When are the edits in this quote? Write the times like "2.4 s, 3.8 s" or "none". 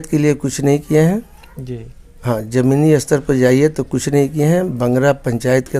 none